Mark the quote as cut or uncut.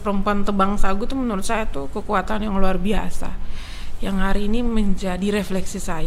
uncut